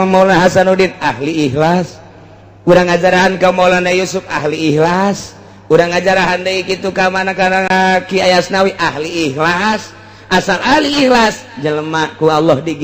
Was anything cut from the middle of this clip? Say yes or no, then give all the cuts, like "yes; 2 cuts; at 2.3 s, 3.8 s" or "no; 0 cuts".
yes; 1 cut; at 7.7 s